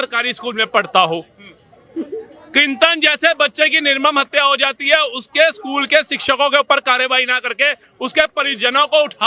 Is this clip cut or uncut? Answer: uncut